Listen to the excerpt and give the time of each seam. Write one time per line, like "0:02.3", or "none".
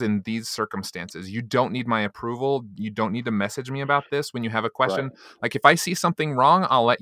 none